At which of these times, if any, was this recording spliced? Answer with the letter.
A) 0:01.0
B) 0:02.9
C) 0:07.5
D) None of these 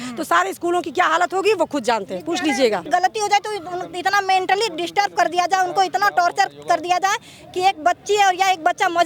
B